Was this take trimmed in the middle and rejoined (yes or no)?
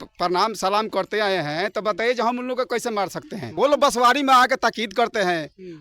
yes